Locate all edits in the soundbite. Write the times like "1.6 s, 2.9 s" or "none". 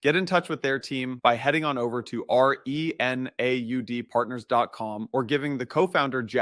none